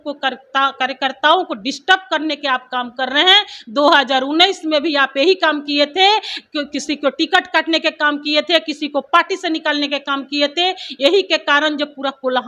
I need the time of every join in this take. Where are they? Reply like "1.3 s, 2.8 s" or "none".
none